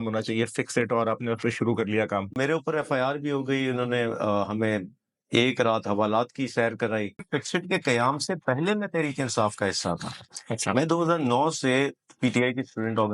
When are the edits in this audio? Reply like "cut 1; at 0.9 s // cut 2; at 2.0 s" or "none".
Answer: cut 1; at 2.4 s // cut 2; at 7.2 s